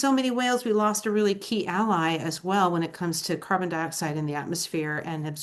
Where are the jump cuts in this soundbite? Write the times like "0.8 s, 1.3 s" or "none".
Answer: none